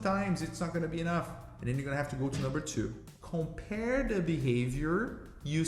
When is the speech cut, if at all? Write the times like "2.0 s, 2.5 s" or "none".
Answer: 3.1 s